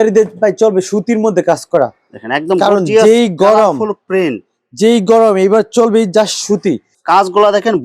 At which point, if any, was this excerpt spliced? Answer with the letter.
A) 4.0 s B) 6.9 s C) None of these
B